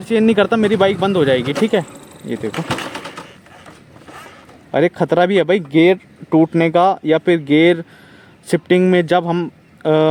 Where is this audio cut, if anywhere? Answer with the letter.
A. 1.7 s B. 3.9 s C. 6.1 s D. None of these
D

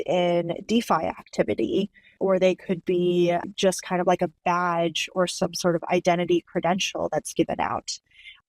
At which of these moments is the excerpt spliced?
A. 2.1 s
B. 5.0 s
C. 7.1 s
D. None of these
A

